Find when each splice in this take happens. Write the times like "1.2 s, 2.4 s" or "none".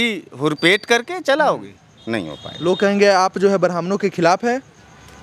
none